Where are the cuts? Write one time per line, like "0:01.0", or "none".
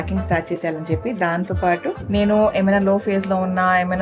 0:02.0

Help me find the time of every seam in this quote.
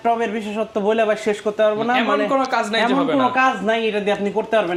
none

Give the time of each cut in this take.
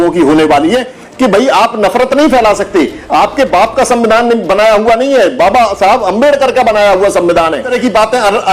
0:01.0
0:07.7

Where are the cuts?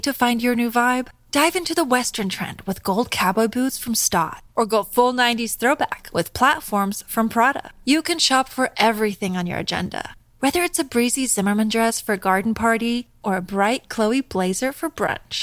none

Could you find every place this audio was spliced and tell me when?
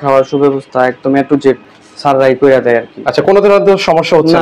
none

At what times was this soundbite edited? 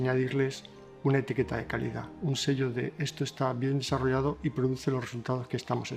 none

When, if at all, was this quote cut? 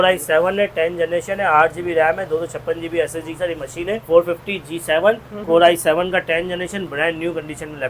0:04.0

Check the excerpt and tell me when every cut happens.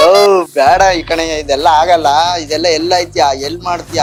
none

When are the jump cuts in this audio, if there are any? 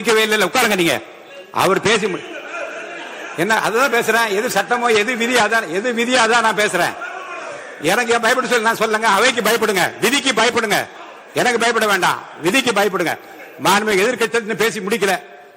none

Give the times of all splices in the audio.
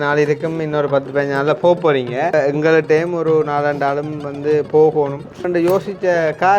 0:02.3
0:05.4

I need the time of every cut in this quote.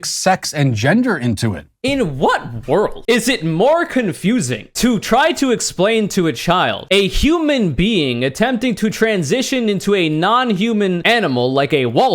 0:01.7

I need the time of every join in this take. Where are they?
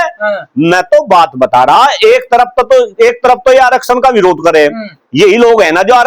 none

